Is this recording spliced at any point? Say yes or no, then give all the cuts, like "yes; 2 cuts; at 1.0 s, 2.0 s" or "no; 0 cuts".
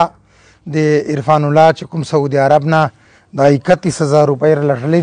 no; 0 cuts